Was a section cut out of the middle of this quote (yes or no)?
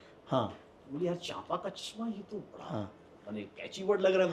no